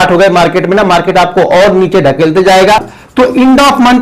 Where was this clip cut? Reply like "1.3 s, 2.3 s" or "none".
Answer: 3.0 s